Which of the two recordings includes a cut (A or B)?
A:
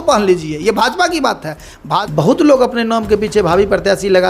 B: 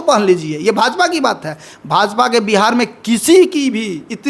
A